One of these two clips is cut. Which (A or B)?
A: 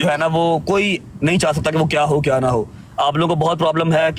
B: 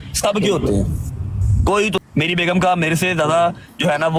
B